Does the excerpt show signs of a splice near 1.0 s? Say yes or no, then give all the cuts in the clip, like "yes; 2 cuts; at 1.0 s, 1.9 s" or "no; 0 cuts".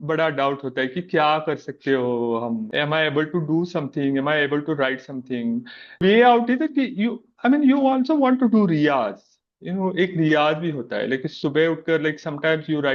no; 2 cuts; at 2.7 s, 6.0 s